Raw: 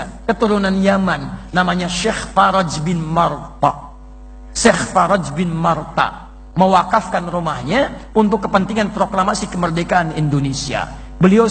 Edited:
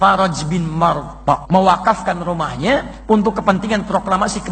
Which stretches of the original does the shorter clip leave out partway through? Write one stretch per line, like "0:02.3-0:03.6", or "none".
0:03.8-0:06.5